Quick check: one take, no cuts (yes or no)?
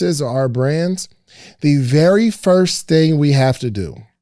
yes